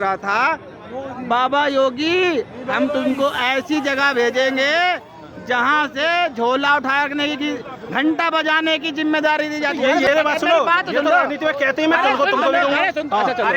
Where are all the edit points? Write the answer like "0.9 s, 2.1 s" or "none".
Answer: 10.1 s